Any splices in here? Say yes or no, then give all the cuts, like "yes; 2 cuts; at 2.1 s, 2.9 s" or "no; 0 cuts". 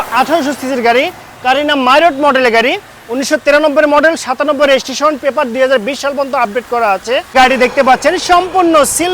yes; 1 cut; at 7.3 s